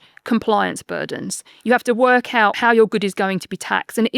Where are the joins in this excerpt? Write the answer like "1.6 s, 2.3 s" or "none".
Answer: 2.6 s